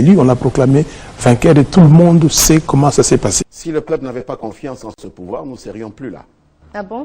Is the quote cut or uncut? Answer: cut